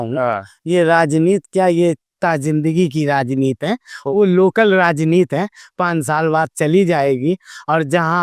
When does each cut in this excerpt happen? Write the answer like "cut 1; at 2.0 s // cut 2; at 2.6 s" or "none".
none